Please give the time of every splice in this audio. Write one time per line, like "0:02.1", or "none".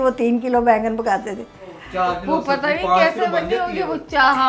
0:01.8